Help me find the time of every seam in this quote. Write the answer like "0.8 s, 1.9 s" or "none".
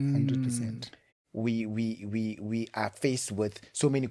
1.1 s

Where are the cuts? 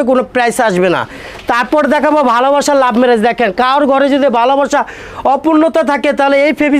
none

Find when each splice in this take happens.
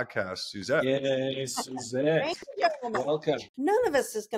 3.5 s

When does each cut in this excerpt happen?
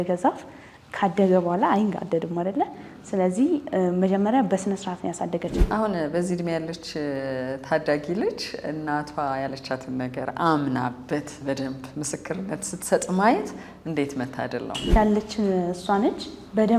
5.5 s, 14.9 s

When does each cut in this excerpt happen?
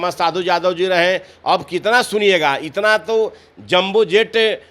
none

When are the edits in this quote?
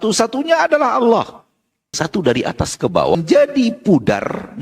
1.9 s, 3.2 s

